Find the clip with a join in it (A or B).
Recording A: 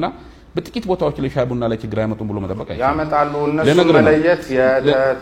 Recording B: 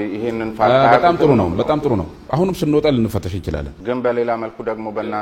B